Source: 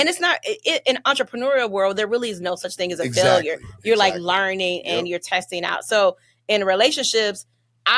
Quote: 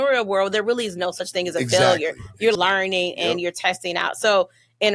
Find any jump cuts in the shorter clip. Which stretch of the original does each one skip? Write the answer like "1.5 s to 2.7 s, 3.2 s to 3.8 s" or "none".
4.0 s to 4.2 s